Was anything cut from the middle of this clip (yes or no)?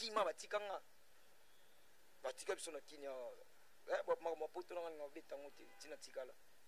no